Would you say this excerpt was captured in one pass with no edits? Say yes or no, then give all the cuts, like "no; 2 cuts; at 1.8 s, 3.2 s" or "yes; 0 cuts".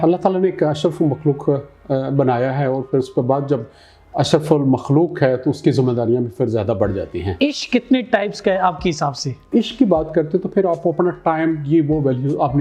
no; 2 cuts; at 7.2 s, 9.5 s